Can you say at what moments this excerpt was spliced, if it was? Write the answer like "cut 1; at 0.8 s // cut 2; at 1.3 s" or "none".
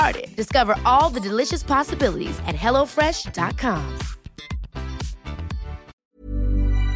cut 1; at 5.9 s

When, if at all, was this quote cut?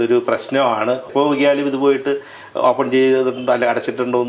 cut 1; at 1.1 s

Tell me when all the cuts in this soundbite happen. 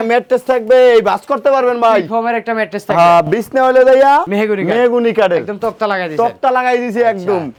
none

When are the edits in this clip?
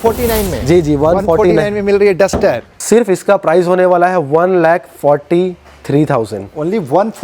cut 1; at 2.8 s

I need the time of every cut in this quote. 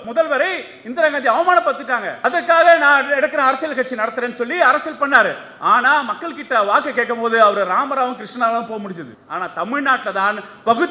cut 1; at 2.1 s

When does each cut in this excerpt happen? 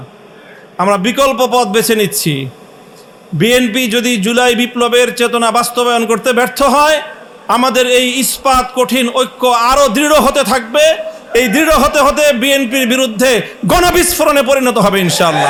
none

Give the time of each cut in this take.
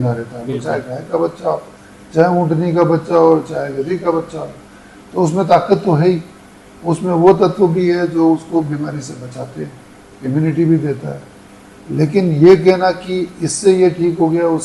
none

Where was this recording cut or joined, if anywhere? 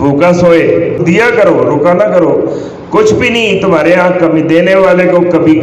cut 1; at 1.0 s

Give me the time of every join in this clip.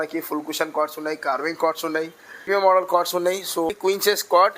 cut 1; at 2.5 s // cut 2; at 3.7 s

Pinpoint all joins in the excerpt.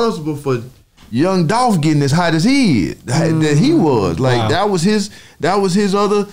none

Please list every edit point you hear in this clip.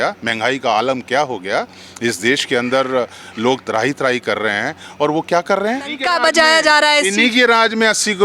cut 1; at 6.0 s

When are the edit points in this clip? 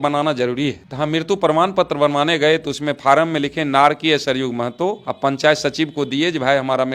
none

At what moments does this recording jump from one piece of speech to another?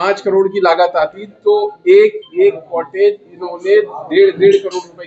none

